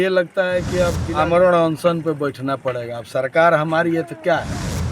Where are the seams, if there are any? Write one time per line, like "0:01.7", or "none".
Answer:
0:01.0

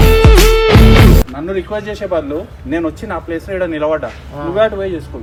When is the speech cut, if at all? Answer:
none

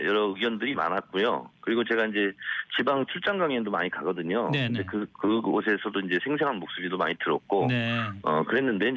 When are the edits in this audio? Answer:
0:01.4

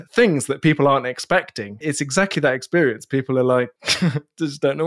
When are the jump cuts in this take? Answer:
0:01.7
0:03.8

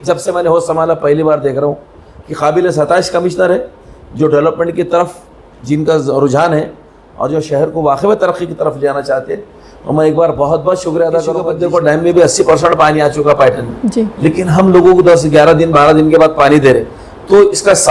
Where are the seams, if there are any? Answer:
0:11.5

